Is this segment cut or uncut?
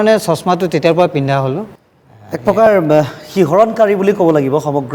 uncut